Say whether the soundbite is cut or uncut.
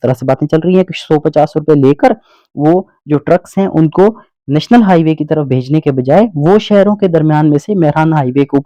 uncut